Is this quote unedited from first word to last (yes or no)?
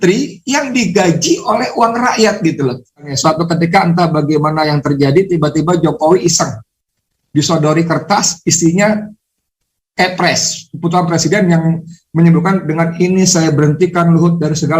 no